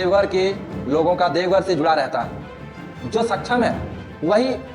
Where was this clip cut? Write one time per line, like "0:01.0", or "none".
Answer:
0:03.0